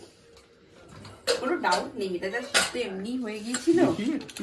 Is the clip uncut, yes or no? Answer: yes